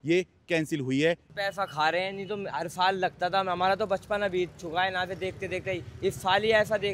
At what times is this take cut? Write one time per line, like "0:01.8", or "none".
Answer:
0:01.3